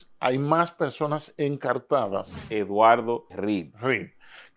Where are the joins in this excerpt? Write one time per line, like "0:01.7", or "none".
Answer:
0:02.4